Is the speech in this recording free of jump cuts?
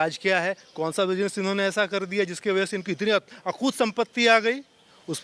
yes; 0 cuts

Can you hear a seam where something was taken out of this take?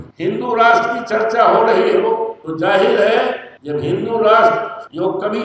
no; 0 cuts

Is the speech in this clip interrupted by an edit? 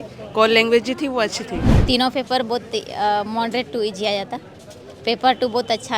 yes; 1 cut; at 1.7 s

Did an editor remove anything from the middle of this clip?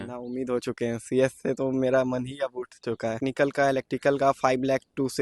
yes; 1 cut; at 3.2 s

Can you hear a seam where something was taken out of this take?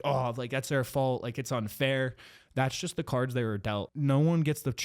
yes; 1 cut; at 3.9 s

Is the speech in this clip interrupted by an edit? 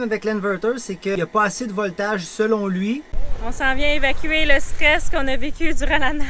yes; 2 cuts; at 1.2 s, 3.2 s

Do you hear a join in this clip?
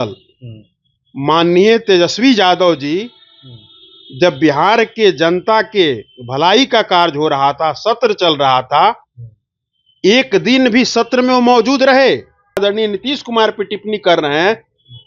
yes; 1 cut; at 12.6 s

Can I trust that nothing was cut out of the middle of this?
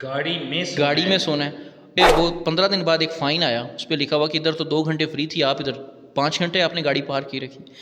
no; 1 cut; at 2.0 s

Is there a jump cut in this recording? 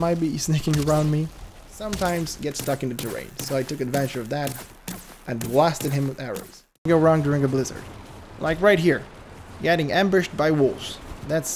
yes; 2 cuts; at 1.8 s, 6.9 s

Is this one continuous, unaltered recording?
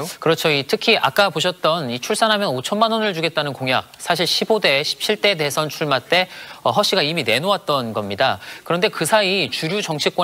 yes; 0 cuts

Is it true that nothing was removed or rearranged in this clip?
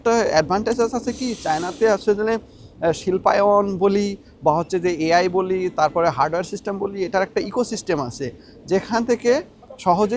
yes; 0 cuts

